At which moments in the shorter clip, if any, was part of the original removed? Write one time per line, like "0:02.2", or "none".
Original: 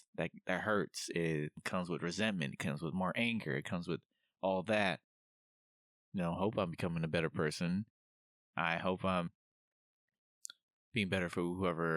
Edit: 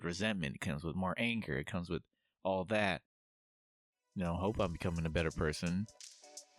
none

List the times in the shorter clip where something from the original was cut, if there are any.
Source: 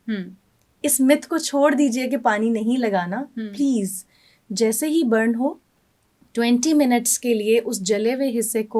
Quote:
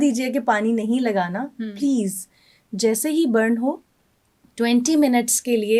none

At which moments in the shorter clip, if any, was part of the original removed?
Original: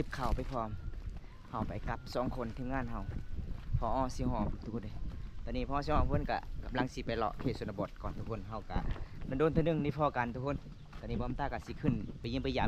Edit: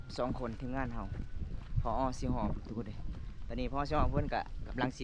none

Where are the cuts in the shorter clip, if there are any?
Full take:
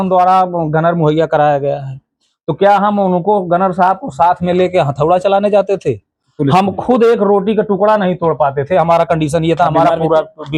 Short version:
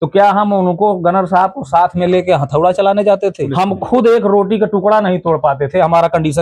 0:03.4

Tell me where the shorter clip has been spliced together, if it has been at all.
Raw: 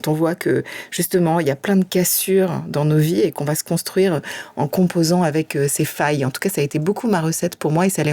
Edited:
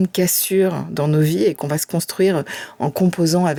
none

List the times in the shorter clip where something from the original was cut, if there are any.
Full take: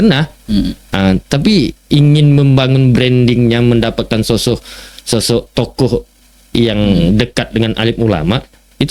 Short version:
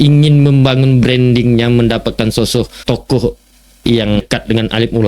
0:02.8
0:04.2

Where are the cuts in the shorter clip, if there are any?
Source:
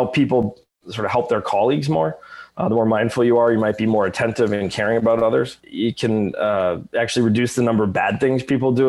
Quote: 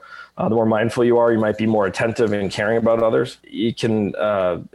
none

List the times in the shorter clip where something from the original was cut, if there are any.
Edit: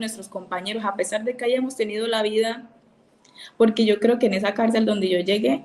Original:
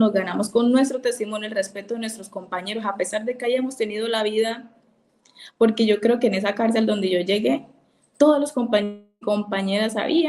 none

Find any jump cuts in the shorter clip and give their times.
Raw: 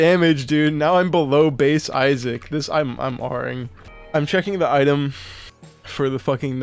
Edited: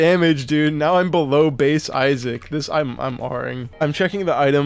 0:03.6

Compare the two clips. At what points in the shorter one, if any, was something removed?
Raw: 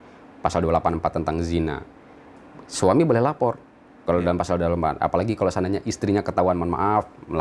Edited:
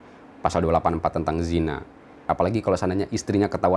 0:02.2

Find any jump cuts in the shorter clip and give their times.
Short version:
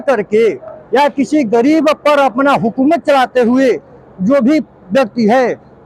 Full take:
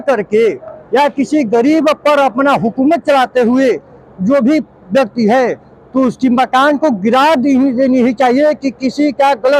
none

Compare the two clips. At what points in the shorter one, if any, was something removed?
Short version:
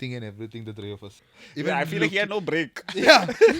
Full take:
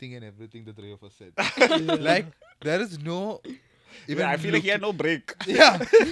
0:01.1

